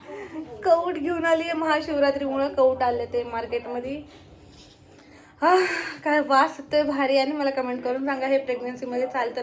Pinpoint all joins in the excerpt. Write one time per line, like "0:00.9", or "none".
none